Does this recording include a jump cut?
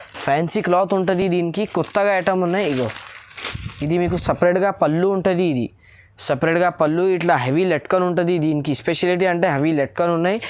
no; 0 cuts

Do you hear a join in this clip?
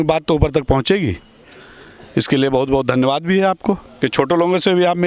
no; 0 cuts

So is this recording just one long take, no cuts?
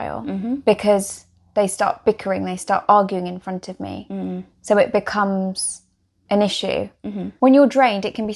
no; 1 cut; at 7.3 s

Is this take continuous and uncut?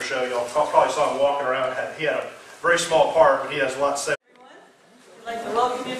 yes; 0 cuts

